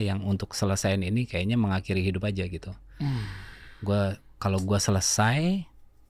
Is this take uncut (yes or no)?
yes